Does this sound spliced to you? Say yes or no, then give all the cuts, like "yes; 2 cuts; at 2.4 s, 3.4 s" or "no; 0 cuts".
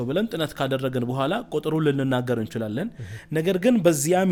no; 0 cuts